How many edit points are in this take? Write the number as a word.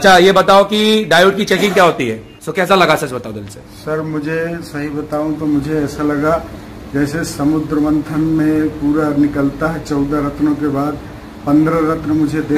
one